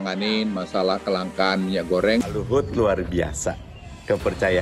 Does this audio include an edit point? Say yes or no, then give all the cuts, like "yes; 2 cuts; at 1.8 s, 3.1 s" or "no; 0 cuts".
yes; 1 cut; at 2.2 s